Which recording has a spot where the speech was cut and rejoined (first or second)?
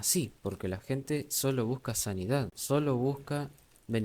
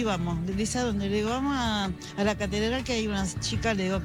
first